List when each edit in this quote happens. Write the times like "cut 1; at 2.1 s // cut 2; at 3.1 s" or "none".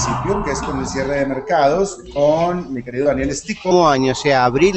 none